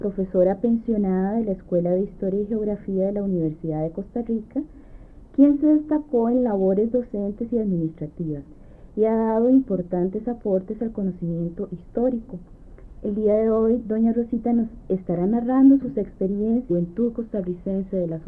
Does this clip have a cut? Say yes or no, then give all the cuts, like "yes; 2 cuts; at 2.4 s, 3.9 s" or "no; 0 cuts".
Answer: no; 0 cuts